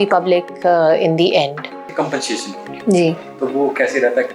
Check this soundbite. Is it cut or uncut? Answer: cut